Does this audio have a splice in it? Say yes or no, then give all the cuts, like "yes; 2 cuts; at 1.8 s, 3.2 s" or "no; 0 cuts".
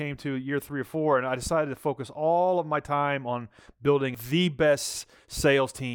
yes; 1 cut; at 4.1 s